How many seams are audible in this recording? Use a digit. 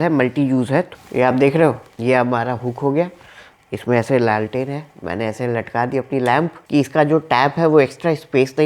2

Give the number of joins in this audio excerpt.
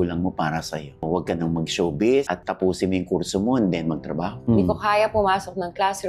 2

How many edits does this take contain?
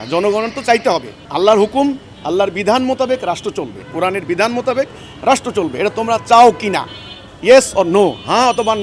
1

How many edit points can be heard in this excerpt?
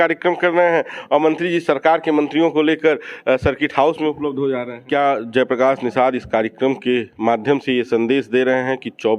1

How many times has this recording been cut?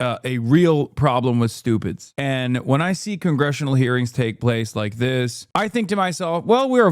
2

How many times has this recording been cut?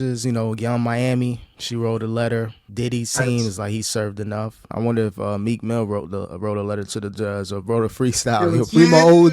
3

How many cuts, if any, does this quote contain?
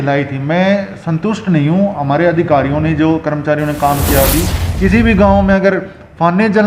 1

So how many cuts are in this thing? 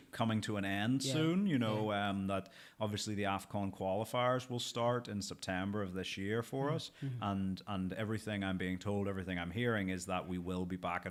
0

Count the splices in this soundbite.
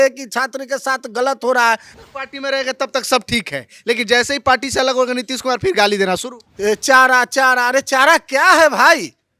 2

